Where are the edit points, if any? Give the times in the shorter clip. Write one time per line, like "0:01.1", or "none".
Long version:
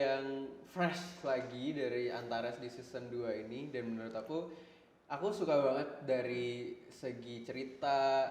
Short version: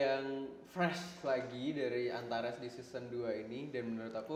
none